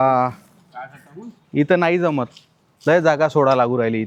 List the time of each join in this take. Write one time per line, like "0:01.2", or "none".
none